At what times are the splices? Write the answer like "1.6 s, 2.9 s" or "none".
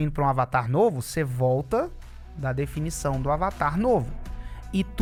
none